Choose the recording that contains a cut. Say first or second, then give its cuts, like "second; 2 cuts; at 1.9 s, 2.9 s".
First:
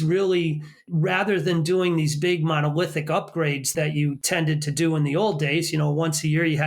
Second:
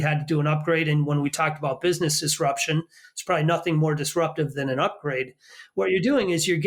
first; 2 cuts; at 0.8 s, 4.1 s